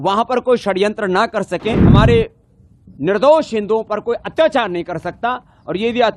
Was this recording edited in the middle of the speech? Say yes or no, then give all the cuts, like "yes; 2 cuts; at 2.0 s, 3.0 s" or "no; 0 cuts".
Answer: yes; 1 cut; at 1.8 s